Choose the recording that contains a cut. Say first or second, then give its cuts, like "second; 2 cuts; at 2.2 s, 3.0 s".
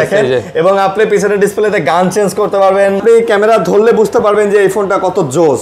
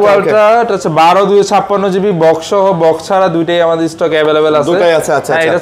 first; 1 cut; at 3.0 s